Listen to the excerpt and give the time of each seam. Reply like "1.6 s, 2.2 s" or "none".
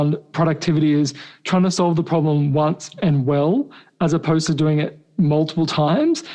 5.0 s

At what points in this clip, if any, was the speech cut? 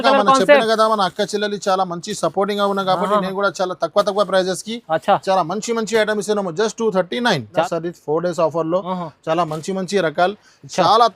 7.6 s

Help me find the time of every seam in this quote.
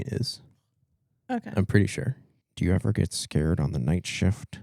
2.4 s

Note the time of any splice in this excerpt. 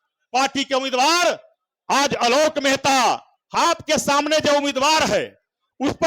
3.3 s

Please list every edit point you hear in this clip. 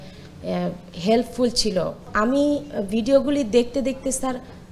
2.0 s

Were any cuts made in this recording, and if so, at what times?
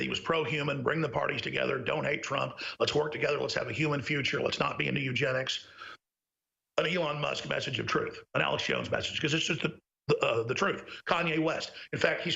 none

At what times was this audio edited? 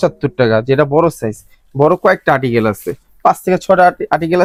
none

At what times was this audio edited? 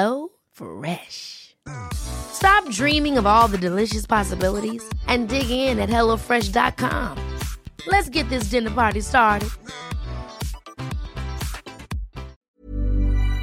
12.5 s

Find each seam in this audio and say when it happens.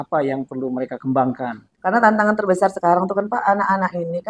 1.6 s

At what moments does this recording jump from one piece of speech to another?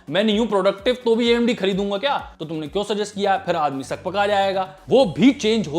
2.3 s, 4.8 s

